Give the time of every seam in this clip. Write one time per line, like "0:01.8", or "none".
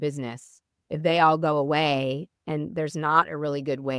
none